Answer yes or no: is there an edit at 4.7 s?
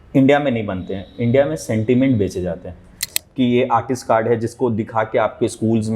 no